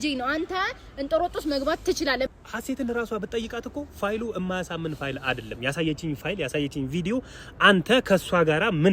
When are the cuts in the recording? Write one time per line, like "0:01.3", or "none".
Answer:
0:02.3